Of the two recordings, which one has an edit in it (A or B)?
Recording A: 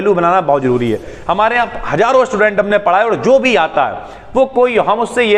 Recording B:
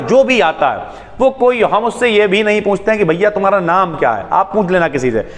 A